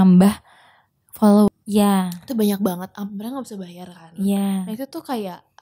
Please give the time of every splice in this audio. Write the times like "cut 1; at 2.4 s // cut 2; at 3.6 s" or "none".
cut 1; at 1.5 s

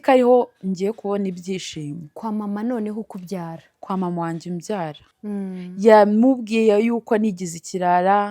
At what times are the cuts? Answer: cut 1; at 5.0 s

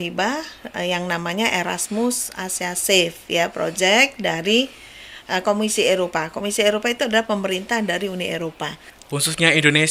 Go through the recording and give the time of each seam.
cut 1; at 8.9 s

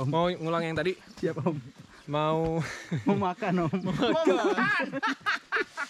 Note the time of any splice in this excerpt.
none

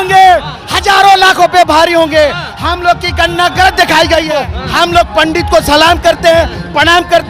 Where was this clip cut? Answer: cut 1; at 4.4 s

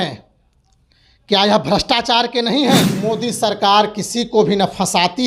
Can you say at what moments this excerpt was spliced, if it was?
cut 1; at 3.1 s

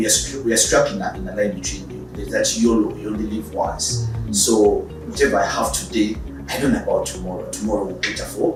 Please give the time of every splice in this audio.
none

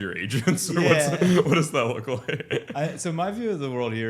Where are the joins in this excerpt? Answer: none

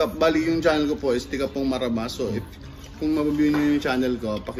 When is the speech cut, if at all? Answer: cut 1; at 2.2 s

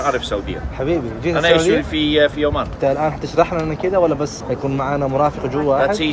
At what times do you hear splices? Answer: cut 1; at 2.7 s // cut 2; at 4.4 s

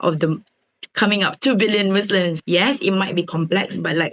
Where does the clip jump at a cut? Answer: cut 1; at 2.3 s

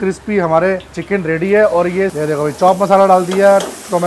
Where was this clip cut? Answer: cut 1; at 0.9 s // cut 2; at 2.1 s

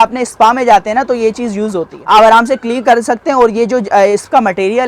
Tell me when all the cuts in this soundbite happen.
cut 1; at 2.0 s

